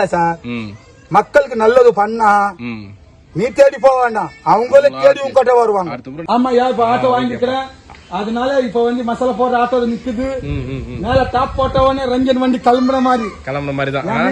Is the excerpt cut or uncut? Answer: cut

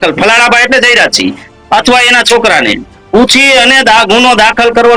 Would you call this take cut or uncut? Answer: uncut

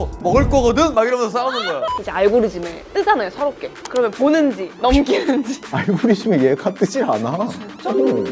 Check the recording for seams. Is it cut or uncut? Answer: cut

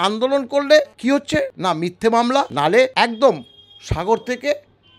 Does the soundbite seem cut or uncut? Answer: cut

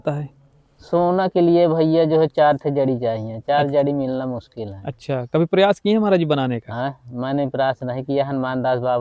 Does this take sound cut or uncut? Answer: uncut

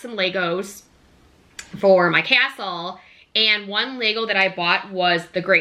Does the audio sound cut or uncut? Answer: uncut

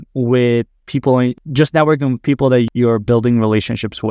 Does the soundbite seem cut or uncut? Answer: cut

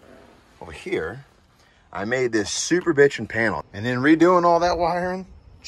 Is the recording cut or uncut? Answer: cut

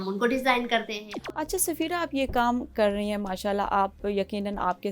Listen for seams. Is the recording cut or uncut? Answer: cut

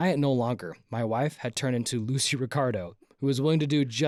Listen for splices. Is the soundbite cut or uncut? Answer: uncut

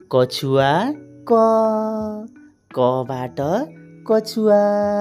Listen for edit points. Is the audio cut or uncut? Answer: uncut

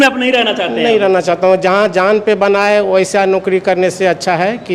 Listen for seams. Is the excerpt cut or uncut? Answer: uncut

